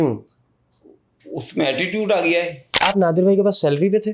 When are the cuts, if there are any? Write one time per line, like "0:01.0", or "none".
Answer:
0:02.8